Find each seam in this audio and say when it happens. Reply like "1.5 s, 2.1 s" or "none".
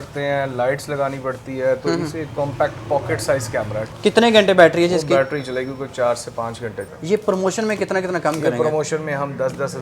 3.8 s, 6.9 s